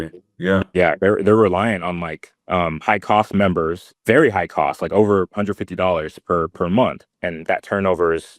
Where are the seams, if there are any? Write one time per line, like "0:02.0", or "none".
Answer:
0:02.3
0:03.9
0:07.1